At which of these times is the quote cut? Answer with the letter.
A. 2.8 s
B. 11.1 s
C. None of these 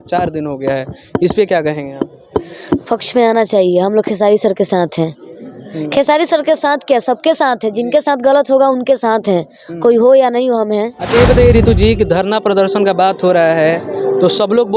B